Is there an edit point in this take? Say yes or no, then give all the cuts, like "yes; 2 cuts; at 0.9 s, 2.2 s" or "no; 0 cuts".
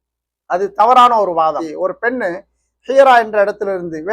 yes; 1 cut; at 1.7 s